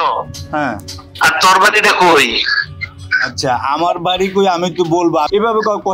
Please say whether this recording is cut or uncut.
uncut